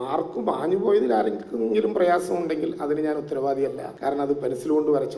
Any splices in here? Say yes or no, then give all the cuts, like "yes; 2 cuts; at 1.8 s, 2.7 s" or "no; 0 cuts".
yes; 1 cut; at 3.9 s